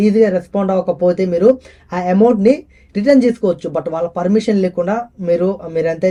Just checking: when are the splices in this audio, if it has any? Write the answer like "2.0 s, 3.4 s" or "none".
none